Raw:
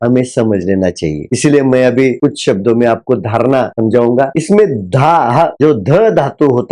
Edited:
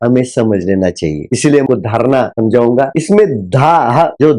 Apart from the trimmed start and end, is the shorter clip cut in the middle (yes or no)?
yes